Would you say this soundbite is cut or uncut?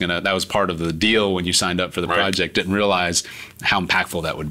uncut